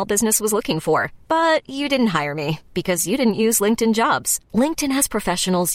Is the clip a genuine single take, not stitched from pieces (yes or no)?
yes